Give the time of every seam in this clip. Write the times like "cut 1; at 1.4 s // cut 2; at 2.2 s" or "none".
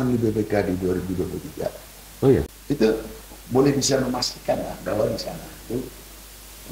cut 1; at 2.5 s